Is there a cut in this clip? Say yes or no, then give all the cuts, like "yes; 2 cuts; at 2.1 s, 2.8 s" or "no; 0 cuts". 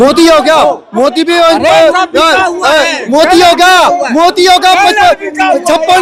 no; 0 cuts